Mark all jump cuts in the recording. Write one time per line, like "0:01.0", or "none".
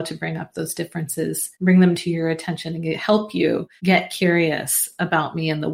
0:01.5
0:03.7